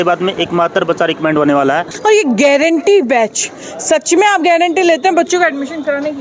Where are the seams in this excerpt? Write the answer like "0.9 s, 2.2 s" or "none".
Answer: 1.9 s